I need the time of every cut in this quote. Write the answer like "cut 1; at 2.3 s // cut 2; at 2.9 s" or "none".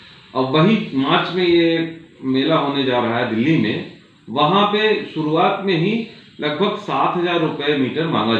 none